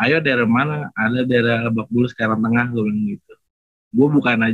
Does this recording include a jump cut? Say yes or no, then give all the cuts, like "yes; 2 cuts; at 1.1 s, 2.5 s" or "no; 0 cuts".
no; 0 cuts